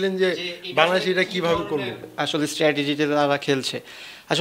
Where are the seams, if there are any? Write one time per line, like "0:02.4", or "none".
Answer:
none